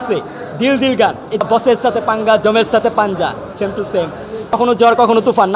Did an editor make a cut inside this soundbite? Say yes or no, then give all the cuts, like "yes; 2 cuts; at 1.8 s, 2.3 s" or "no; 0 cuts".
yes; 2 cuts; at 1.4 s, 4.5 s